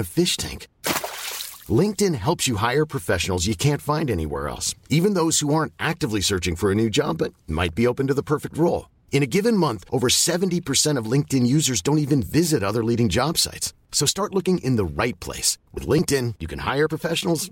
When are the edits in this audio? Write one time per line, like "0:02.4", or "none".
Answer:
none